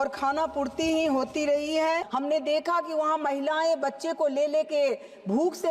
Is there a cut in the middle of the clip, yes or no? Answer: yes